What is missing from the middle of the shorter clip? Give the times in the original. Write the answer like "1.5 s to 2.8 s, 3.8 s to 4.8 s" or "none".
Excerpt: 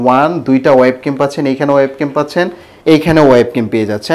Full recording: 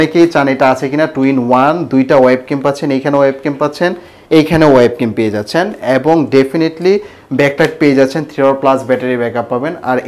none